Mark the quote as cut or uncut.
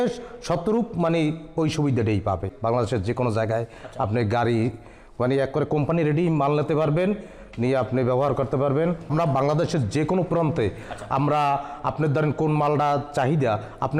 cut